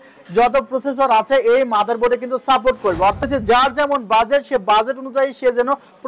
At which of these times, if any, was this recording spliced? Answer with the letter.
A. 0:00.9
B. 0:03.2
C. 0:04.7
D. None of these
B